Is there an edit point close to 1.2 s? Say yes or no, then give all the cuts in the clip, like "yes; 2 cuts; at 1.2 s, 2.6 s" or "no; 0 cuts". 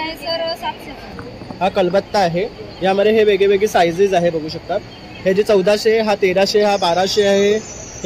yes; 1 cut; at 1.2 s